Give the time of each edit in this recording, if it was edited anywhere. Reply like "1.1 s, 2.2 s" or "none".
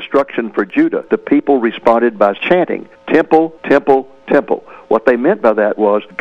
1.0 s